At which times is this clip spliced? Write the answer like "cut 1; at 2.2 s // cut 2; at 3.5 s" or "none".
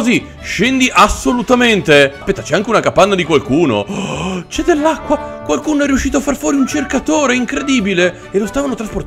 cut 1; at 2.3 s // cut 2; at 5.3 s